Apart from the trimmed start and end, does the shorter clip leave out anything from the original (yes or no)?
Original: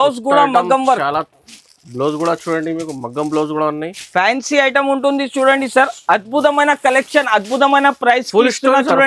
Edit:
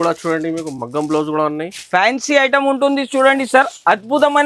no